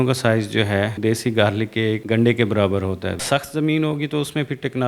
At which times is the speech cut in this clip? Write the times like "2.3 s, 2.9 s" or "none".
0.9 s, 2.0 s, 3.2 s